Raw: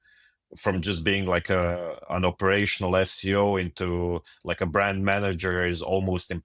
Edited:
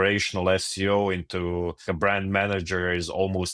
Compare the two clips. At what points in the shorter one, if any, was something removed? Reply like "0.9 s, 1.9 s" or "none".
1.8 s